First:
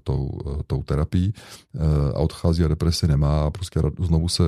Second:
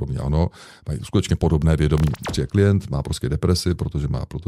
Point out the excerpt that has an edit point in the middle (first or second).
second